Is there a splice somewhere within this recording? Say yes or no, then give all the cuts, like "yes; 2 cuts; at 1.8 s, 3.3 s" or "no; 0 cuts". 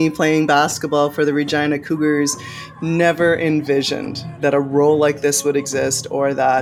no; 0 cuts